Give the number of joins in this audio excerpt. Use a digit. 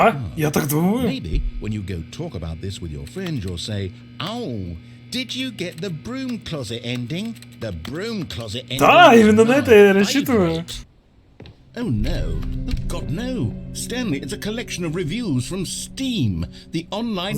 1